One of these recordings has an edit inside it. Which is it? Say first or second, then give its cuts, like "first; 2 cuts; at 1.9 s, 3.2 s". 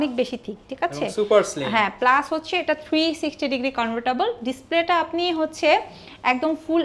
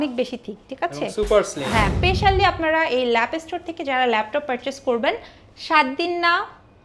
second; 1 cut; at 1.9 s